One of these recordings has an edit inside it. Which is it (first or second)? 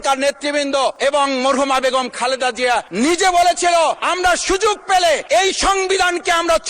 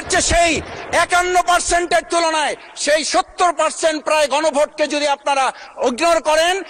first